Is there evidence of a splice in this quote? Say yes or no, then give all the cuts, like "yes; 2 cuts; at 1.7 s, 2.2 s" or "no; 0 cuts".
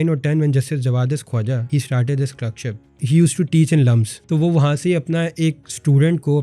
yes; 3 cuts; at 1.6 s, 3.0 s, 4.1 s